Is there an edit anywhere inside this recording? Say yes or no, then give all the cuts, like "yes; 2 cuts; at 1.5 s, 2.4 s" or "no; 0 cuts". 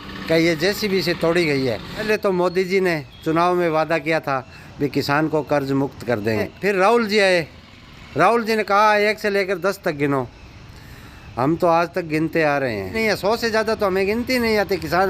yes; 3 cuts; at 2.1 s, 6.5 s, 12.9 s